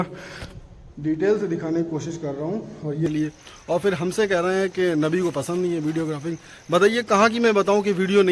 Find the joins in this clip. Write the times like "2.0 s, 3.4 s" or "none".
3.1 s